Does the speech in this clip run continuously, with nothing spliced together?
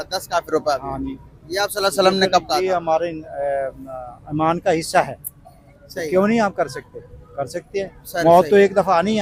yes; 0 cuts

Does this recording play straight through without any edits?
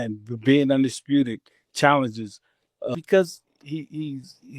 no; 1 cut; at 3.0 s

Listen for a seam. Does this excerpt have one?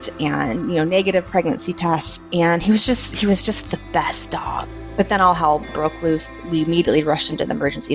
yes; 2 cuts; at 4.8 s, 6.3 s

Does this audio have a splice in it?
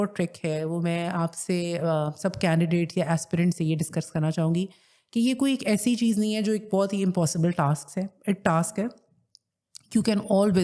no; 0 cuts

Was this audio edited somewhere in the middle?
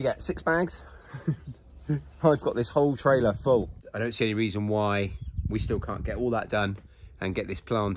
yes; 1 cut; at 3.8 s

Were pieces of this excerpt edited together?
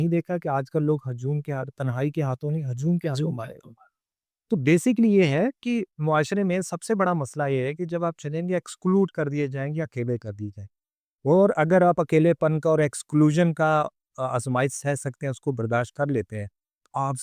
no; 0 cuts

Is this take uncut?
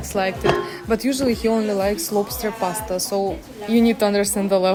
yes; 0 cuts

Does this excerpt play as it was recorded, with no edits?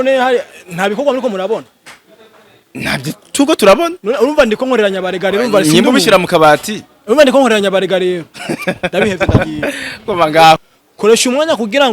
no; 1 cut; at 10.6 s

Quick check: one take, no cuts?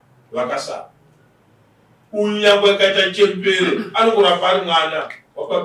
yes; 0 cuts

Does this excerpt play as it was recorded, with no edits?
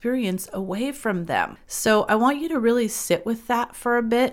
no; 1 cut; at 1.6 s

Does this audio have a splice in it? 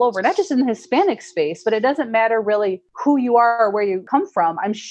yes; 2 cuts; at 2.9 s, 4.0 s

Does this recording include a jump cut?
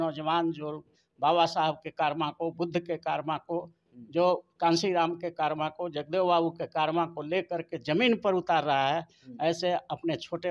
no; 0 cuts

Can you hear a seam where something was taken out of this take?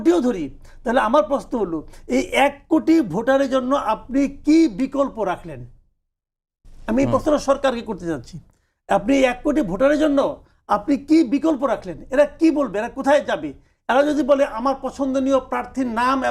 no; 0 cuts

